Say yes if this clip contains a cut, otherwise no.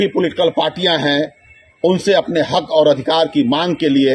no